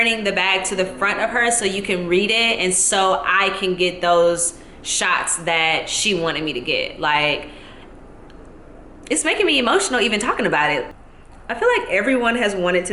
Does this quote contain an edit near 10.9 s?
yes; 1 cut; at 10.9 s

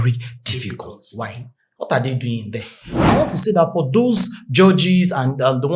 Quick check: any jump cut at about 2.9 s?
yes; 1 cut; at 2.9 s

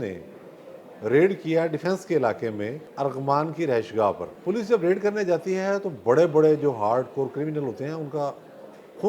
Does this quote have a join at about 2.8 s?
yes; 2 cuts; at 2.8 s, 4.3 s

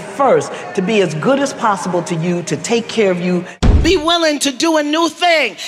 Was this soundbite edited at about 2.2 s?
no; 1 cut; at 3.6 s

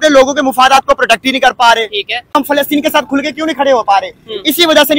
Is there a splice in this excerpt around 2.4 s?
yes; 1 cut; at 2.4 s

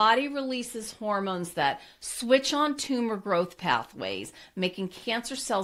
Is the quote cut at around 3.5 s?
no; 0 cuts

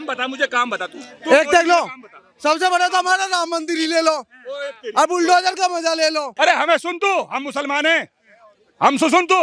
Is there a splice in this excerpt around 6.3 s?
yes; 1 cut; at 6.3 s

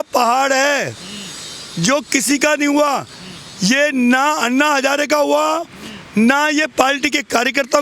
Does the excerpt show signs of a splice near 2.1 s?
no; 0 cuts

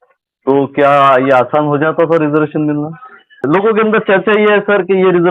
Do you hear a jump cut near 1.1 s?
no; 1 cut; at 3.4 s

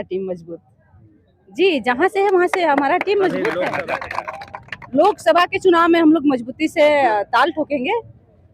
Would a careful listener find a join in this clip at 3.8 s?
yes; 1 cut; at 3.8 s

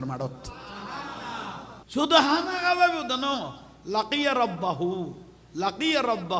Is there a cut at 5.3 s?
no; 1 cut; at 1.8 s

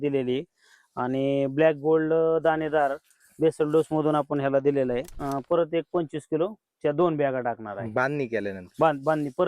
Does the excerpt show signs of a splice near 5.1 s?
yes; 1 cut; at 5.1 s

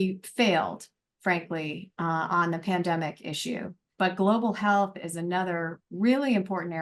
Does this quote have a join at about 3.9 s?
yes; 1 cut; at 3.9 s

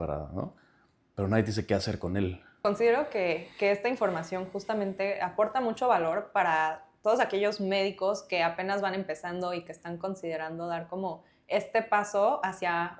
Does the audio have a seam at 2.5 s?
no; 0 cuts

